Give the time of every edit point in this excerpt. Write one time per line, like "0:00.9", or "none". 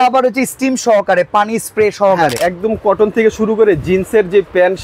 0:02.4